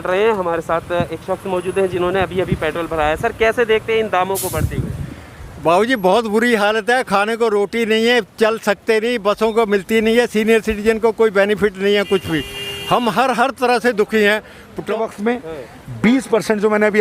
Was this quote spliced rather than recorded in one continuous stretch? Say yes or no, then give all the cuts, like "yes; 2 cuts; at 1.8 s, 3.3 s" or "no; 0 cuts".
yes; 1 cut; at 14.8 s